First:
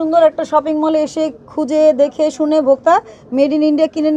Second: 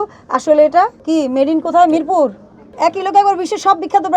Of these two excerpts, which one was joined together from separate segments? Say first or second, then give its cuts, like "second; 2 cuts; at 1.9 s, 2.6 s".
second; 2 cuts; at 1.0 s, 2.7 s